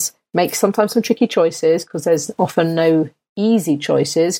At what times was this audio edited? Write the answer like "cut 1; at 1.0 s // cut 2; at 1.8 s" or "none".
none